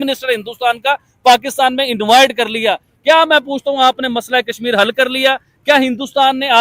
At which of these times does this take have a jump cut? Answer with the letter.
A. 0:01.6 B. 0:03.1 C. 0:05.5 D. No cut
D